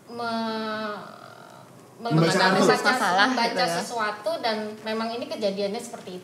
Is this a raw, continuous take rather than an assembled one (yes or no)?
yes